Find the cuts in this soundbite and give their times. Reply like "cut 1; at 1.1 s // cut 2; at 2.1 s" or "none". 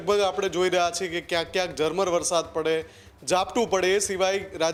none